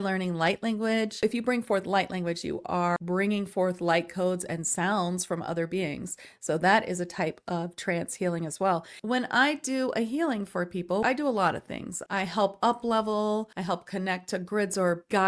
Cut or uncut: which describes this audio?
cut